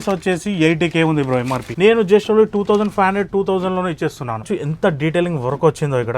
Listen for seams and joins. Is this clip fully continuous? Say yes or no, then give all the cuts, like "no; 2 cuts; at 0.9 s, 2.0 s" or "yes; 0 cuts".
no; 2 cuts; at 1.6 s, 4.5 s